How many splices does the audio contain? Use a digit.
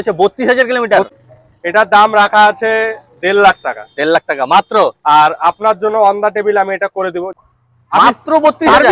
2